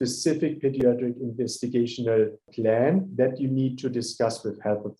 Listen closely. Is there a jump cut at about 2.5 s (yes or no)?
yes